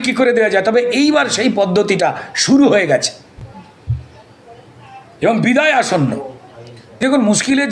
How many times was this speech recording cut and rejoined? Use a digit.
0